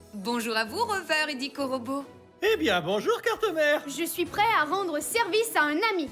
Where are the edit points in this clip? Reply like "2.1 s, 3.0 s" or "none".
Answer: none